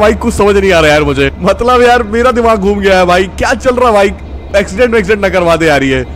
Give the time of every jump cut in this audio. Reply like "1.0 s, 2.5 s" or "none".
1.4 s